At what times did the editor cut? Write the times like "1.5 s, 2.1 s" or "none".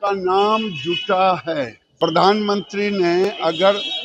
1.8 s